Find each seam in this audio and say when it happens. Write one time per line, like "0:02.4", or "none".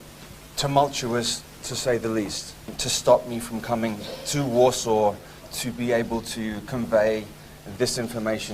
0:02.5